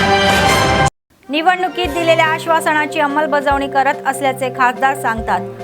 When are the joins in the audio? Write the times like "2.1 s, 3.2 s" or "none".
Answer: 1.0 s